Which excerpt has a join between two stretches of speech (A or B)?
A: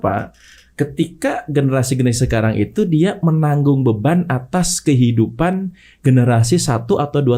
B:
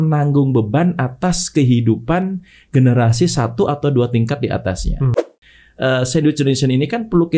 B